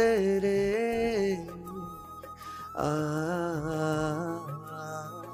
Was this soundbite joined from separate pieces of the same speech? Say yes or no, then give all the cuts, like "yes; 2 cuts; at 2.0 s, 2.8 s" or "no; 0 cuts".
no; 0 cuts